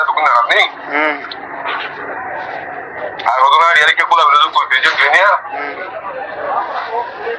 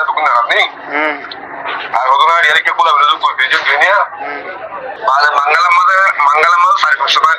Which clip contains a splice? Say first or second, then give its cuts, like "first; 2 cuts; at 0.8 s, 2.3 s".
second; 2 cuts; at 1.9 s, 4.9 s